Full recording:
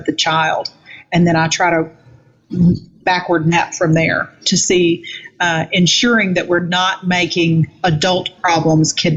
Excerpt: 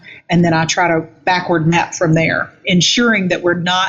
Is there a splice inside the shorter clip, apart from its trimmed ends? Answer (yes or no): yes